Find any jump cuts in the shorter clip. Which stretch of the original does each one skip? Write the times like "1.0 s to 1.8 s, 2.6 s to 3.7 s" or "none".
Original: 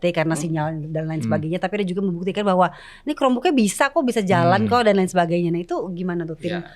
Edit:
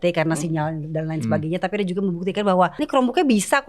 2.8 s to 3.1 s